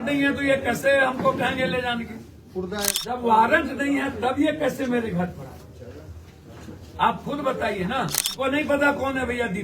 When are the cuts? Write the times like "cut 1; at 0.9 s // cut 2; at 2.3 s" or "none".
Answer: cut 1; at 3.0 s // cut 2; at 8.3 s